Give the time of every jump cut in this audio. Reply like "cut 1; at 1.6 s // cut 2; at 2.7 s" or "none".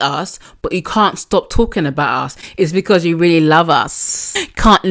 none